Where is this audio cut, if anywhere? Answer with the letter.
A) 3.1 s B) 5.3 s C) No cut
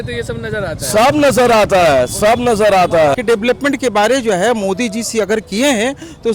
A